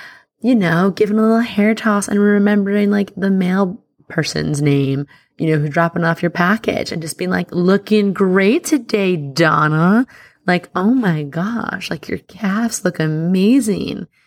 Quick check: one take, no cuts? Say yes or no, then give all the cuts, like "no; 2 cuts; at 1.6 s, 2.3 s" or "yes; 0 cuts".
yes; 0 cuts